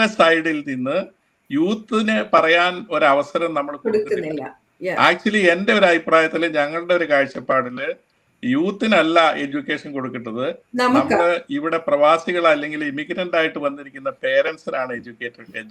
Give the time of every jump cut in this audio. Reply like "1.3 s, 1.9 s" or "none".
none